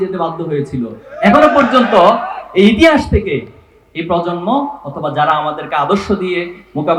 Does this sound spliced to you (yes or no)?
no